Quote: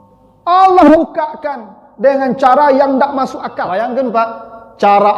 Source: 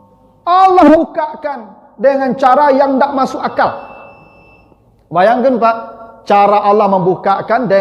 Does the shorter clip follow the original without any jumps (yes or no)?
no